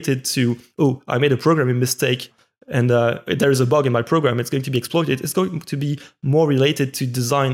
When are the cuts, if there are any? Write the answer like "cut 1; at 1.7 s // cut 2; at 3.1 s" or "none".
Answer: none